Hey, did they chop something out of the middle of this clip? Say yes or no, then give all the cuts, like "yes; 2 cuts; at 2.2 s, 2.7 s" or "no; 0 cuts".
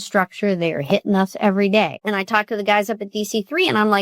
yes; 1 cut; at 2.0 s